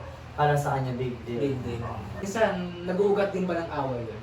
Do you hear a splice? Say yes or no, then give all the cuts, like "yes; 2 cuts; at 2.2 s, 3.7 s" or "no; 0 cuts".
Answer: yes; 1 cut; at 2.2 s